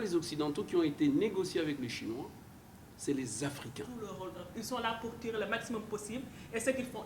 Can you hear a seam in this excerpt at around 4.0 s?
yes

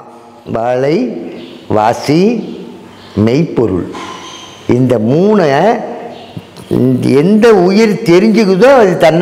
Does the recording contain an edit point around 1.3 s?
no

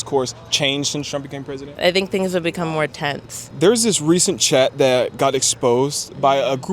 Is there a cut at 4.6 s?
no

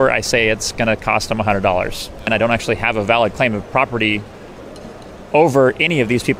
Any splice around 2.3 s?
yes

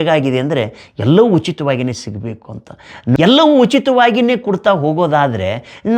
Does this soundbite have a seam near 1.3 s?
no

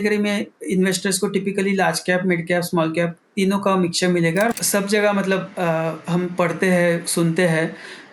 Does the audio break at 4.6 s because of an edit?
yes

